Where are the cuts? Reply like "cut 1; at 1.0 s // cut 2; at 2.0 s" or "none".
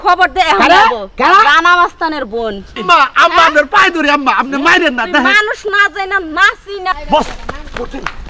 cut 1; at 2.8 s // cut 2; at 6.9 s